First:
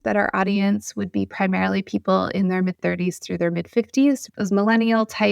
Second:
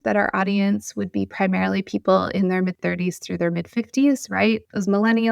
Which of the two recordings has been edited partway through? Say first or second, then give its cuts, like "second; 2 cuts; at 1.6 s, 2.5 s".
first; 1 cut; at 4.3 s